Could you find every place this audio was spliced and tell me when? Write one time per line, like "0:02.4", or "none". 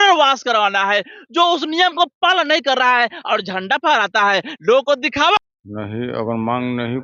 0:05.4